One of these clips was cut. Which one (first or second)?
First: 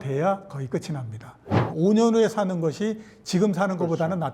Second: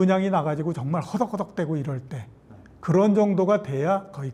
first